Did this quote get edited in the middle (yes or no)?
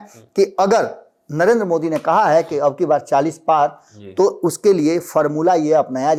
no